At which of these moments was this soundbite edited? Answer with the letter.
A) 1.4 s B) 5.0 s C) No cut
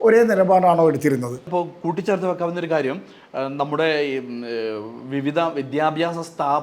A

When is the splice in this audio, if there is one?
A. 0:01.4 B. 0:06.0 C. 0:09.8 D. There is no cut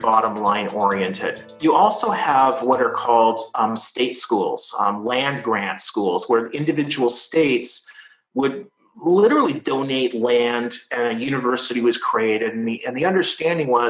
A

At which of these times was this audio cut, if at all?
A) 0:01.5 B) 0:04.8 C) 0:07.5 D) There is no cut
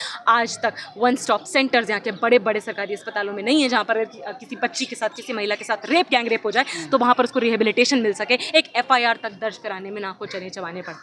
D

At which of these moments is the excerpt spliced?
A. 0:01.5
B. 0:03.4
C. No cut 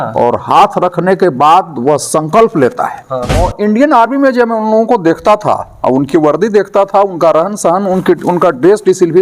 B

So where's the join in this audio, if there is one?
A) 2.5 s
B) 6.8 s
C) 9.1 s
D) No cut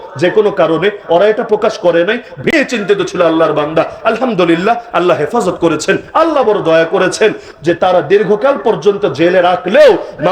A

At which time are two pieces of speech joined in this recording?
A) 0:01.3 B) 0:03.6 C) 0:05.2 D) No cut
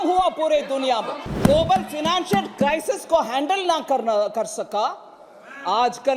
A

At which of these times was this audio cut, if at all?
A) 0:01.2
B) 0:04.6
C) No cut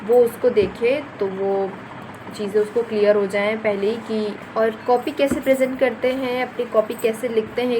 B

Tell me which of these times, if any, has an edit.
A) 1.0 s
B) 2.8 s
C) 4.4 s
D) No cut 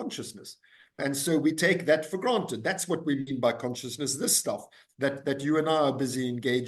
A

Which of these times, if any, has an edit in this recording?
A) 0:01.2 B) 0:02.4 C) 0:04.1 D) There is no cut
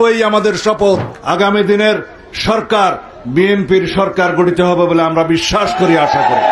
A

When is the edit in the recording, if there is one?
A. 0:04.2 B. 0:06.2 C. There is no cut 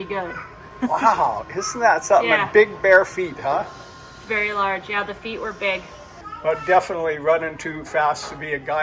B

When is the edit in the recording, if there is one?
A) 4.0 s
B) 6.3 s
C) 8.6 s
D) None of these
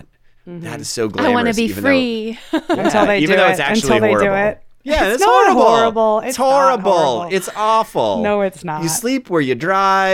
C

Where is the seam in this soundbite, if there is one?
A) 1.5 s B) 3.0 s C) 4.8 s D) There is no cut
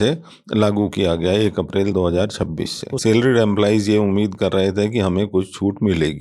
B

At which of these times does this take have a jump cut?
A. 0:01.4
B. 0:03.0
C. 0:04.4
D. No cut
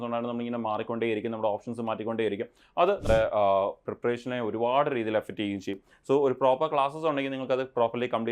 B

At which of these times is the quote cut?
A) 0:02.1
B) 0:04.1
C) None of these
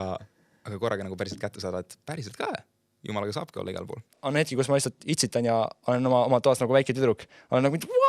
B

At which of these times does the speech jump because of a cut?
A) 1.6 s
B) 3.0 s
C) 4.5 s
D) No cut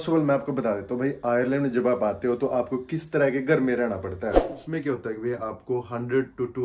C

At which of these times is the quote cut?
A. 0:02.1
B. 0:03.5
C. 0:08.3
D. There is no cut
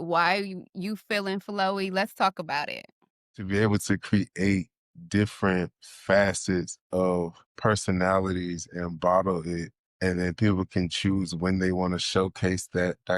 B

